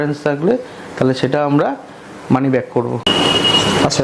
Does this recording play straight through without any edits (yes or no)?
yes